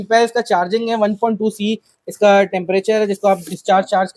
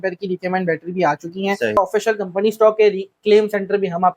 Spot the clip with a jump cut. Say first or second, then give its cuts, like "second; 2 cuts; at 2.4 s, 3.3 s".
second; 1 cut; at 1.8 s